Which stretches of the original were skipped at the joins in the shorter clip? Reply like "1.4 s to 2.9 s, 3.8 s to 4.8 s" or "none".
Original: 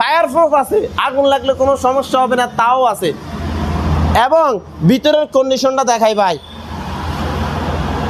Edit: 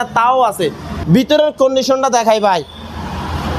3.4 s to 4.7 s